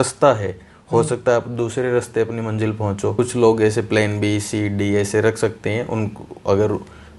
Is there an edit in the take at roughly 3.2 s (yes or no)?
yes